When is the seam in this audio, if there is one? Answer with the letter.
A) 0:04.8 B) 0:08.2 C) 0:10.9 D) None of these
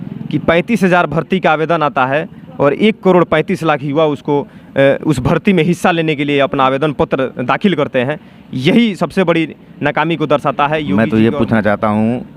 C